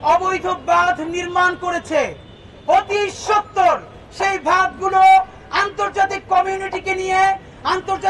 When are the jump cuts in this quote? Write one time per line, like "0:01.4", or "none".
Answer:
none

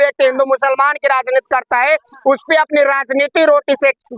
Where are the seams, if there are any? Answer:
none

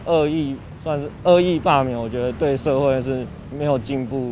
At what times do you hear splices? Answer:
none

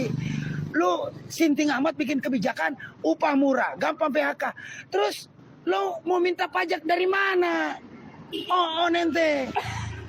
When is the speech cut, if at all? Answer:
none

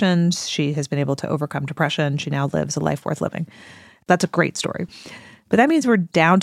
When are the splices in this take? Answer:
0:04.9

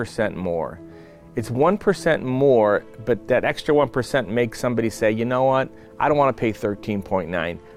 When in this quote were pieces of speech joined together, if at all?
none

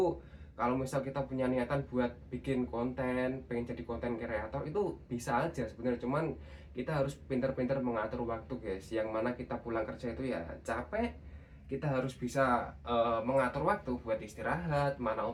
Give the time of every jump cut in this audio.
none

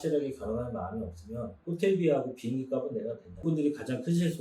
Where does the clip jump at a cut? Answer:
0:03.4

